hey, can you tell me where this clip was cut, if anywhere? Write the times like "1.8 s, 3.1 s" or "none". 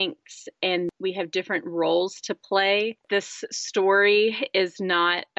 0.9 s, 3.0 s